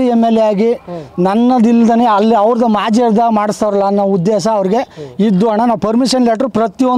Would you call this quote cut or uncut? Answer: uncut